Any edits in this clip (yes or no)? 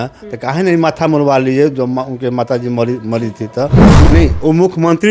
yes